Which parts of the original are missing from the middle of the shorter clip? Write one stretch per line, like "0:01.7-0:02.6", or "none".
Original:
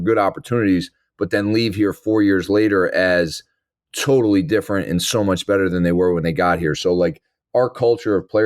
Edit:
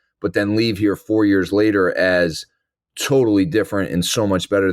none